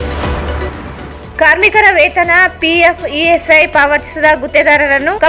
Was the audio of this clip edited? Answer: yes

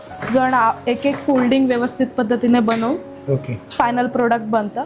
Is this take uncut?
yes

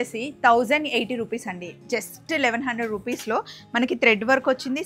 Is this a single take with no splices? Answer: yes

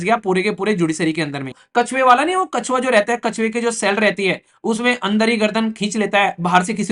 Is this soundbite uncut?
no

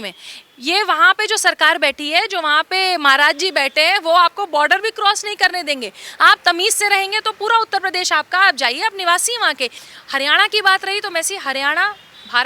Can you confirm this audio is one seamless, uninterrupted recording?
no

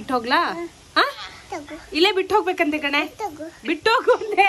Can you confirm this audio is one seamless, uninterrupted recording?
yes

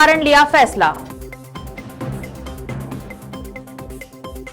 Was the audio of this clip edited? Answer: yes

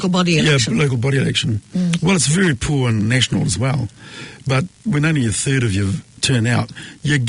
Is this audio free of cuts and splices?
no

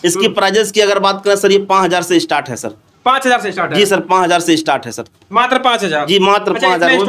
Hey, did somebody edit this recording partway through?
no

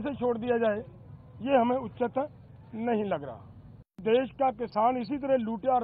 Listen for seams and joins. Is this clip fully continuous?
no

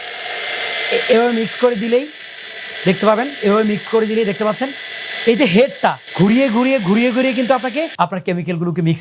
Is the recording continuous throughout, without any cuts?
no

